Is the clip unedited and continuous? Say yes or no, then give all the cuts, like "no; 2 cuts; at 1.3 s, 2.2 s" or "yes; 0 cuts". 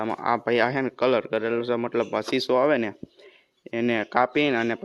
yes; 0 cuts